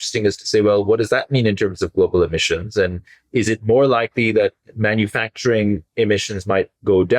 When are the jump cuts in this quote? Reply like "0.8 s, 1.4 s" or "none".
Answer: none